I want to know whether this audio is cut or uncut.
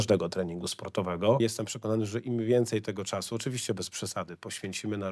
cut